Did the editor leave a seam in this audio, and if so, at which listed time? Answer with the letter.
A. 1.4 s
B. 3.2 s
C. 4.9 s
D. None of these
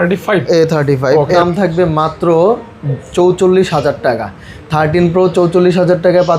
A